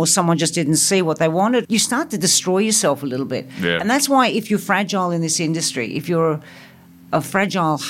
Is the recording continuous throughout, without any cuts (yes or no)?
no